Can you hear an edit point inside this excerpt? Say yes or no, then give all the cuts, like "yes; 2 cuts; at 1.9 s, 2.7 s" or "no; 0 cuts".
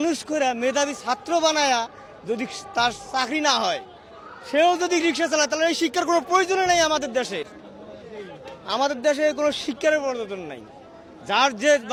no; 0 cuts